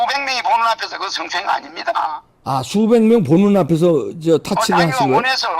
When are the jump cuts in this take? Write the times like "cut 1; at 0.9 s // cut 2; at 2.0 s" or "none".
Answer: none